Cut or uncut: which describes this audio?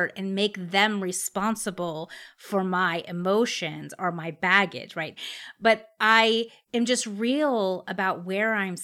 cut